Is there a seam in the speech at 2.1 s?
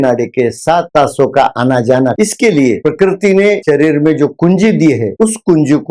yes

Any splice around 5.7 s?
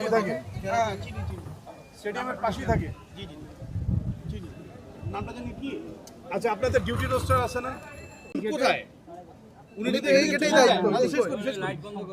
no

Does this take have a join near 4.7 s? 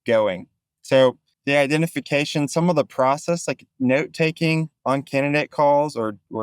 yes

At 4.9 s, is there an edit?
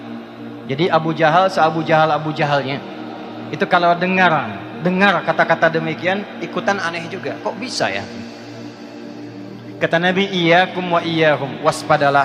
no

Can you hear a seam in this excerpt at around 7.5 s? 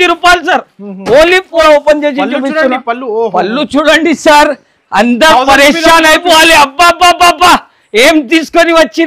no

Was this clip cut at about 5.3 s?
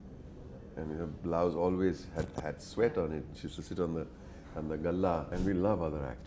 yes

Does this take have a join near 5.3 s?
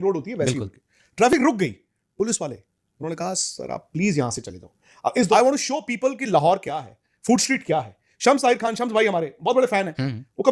yes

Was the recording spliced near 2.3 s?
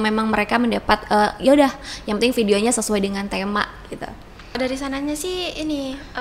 no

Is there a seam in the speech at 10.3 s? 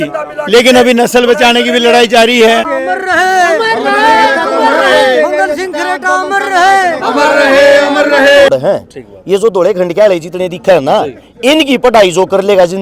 no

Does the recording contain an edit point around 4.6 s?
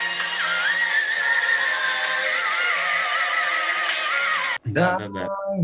yes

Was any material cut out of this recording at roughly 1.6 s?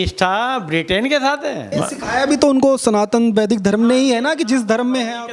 yes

